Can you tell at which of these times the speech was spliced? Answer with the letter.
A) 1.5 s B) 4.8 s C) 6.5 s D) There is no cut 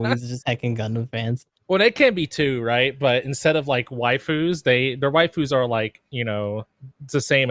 D